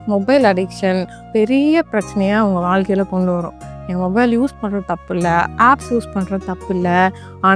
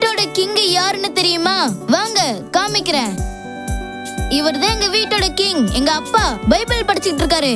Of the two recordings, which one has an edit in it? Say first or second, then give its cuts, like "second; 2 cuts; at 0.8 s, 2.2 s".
first; 1 cut; at 1.3 s